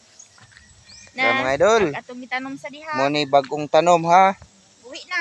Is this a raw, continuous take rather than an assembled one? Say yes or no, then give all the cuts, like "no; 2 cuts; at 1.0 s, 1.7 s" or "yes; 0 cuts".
yes; 0 cuts